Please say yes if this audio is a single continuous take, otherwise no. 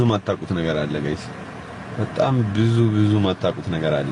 yes